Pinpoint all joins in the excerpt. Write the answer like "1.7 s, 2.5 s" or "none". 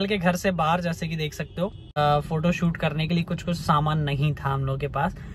2.0 s